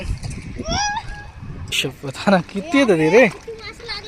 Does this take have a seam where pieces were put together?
yes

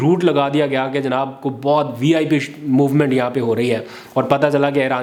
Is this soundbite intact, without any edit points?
yes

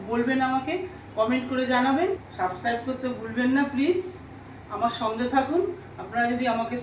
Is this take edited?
yes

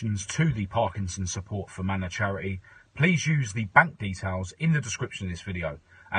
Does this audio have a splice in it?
no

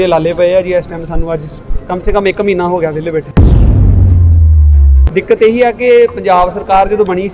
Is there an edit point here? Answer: yes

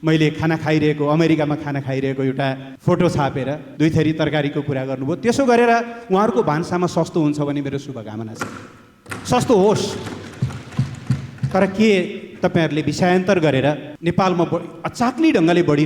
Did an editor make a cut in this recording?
yes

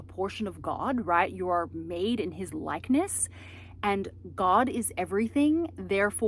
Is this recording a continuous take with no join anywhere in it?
yes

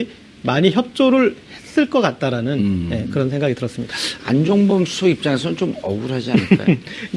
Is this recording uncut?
no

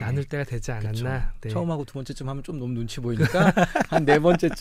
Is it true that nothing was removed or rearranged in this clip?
yes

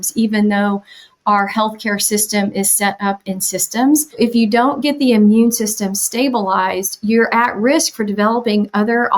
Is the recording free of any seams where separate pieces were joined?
no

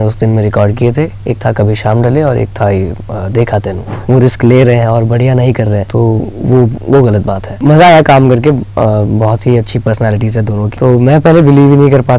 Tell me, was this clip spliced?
yes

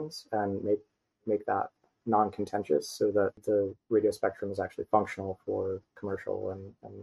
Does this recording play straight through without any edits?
no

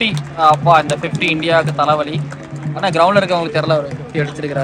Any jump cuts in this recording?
no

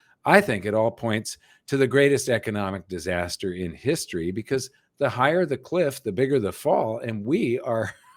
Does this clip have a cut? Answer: no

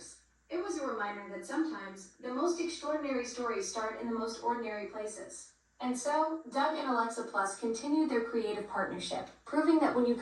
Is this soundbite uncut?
no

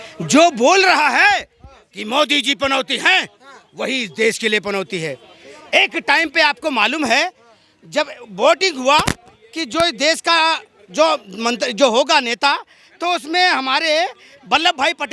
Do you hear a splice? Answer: no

